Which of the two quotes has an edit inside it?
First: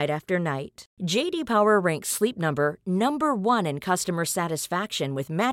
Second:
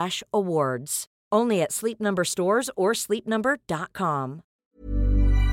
second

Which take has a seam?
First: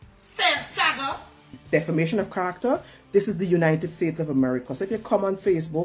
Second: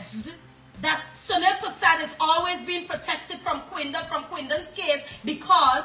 first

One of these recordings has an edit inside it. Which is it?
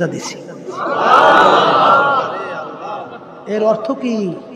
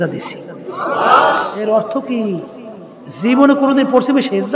second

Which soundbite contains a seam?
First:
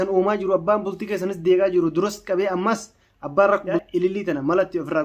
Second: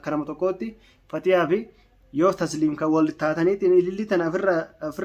first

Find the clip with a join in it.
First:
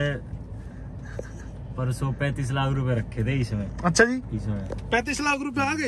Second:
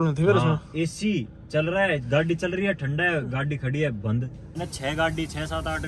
second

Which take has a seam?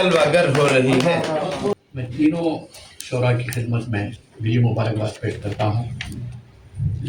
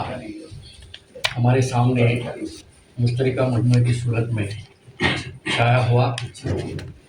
first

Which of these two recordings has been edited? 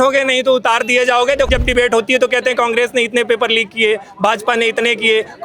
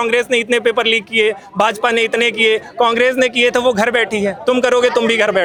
first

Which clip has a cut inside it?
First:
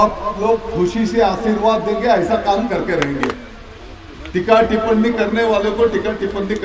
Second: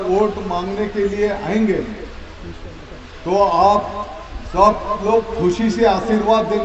first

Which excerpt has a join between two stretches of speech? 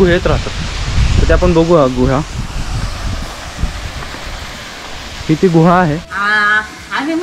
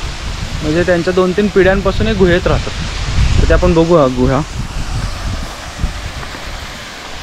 first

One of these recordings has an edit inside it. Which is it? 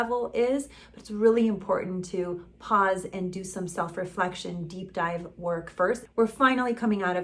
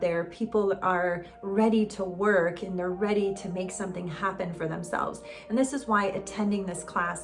first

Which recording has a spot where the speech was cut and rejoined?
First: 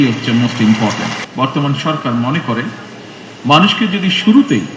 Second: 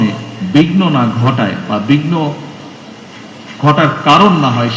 first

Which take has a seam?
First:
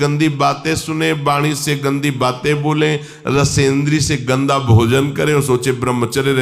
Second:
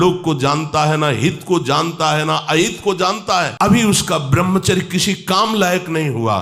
second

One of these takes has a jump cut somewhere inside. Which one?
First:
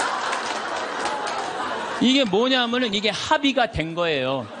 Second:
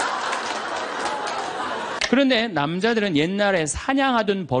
second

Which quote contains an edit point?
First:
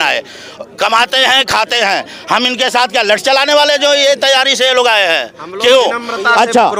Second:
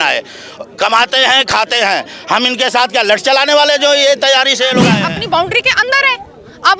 second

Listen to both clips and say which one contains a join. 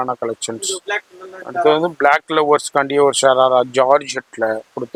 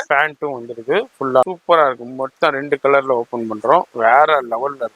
second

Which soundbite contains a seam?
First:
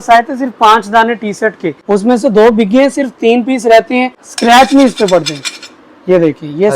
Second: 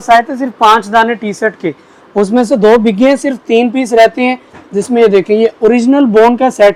first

